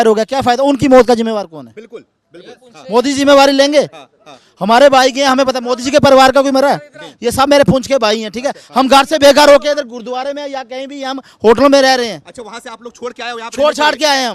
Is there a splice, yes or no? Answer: no